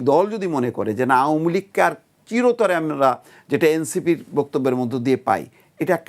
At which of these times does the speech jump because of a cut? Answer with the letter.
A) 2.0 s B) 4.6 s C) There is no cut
C